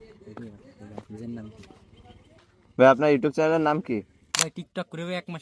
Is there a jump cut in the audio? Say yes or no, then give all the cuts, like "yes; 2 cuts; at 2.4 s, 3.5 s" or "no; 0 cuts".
yes; 1 cut; at 4.2 s